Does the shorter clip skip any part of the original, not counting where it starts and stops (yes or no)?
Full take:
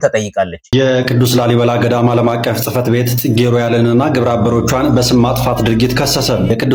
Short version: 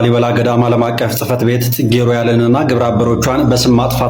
no